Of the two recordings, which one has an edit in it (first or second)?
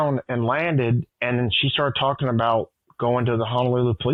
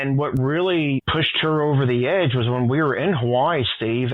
second